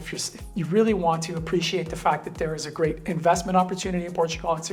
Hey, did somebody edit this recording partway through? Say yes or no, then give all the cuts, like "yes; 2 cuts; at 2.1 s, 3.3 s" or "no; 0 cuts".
no; 0 cuts